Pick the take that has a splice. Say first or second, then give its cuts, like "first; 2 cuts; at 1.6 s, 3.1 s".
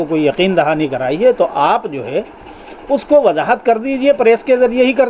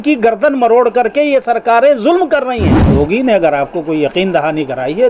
second; 1 cut; at 2.8 s